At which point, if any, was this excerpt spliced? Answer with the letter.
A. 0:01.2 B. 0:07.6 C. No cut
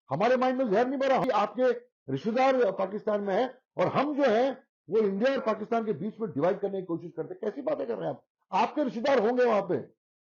A